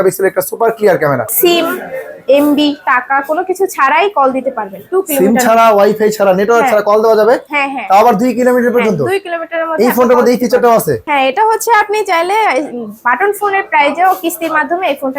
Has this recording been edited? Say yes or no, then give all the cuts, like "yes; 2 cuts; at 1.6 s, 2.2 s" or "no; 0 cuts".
yes; 2 cuts; at 1.3 s, 11.0 s